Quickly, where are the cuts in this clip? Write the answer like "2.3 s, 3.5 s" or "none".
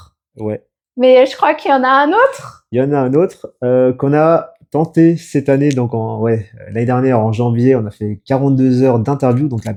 none